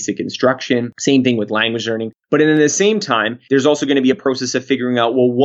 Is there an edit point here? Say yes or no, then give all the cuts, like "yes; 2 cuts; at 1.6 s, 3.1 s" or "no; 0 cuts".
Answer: yes; 2 cuts; at 0.9 s, 3.3 s